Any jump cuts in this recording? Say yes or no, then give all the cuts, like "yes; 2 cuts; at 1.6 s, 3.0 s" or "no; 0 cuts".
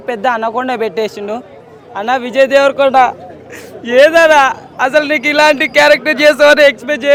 no; 0 cuts